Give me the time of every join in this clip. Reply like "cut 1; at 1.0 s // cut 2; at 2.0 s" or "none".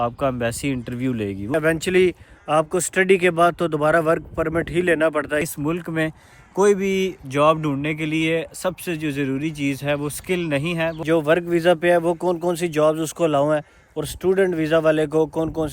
cut 1; at 1.5 s // cut 2; at 5.4 s // cut 3; at 11.0 s